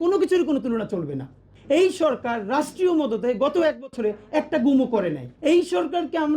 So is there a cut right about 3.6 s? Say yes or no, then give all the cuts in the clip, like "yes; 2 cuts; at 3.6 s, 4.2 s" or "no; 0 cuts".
no; 2 cuts; at 1.5 s, 5.3 s